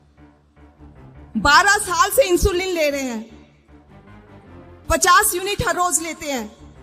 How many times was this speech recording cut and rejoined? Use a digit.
3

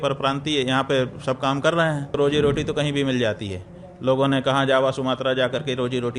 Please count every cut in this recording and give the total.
1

